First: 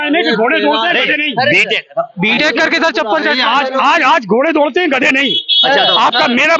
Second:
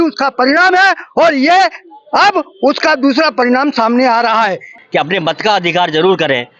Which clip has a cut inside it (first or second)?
second